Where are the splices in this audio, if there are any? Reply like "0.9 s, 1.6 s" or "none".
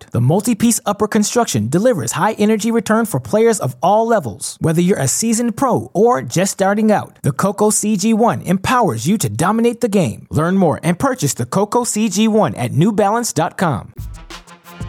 none